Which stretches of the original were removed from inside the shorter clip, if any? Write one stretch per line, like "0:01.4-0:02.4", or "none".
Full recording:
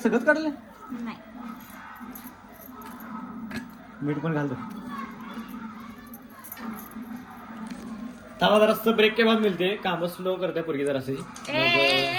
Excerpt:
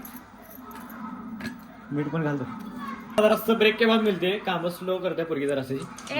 0:05.3-0:08.6